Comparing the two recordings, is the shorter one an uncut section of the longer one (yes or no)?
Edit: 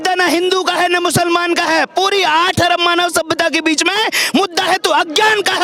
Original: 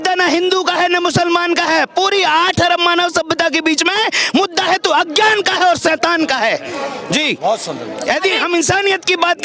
yes